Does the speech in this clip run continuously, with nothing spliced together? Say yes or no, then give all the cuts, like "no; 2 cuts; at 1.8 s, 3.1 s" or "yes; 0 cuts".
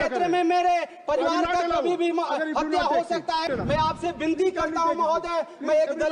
no; 1 cut; at 3.5 s